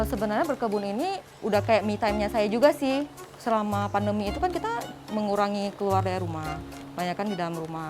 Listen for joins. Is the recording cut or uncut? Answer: cut